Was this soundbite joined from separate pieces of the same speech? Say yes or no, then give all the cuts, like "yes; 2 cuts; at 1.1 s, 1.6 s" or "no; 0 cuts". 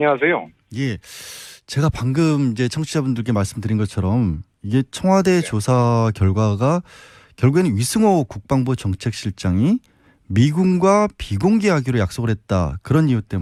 no; 0 cuts